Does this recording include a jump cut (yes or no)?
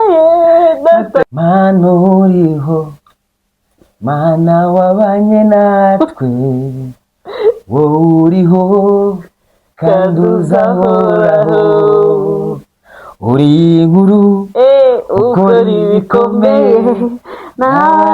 yes